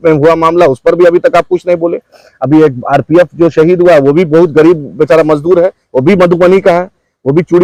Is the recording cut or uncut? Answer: uncut